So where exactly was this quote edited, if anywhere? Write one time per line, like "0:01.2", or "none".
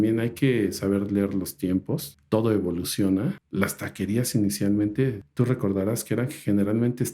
0:02.1
0:03.4
0:05.2